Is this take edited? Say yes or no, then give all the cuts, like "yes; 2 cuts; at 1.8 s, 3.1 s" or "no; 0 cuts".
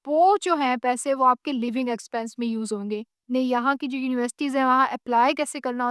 yes; 1 cut; at 3.1 s